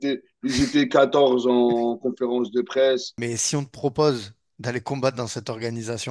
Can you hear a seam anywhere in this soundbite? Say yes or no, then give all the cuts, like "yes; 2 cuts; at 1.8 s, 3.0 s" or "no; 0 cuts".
yes; 1 cut; at 3.1 s